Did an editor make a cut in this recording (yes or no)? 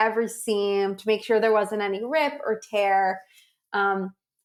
no